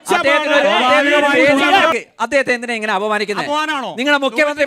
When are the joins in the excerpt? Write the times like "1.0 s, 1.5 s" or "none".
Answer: 1.9 s